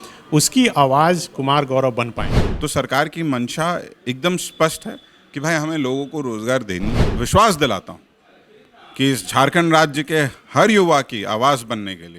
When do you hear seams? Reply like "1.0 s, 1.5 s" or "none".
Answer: 2.4 s, 7.1 s